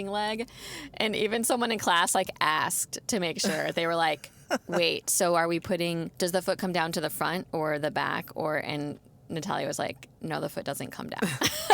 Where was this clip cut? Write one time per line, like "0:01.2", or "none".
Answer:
0:06.1
0:10.1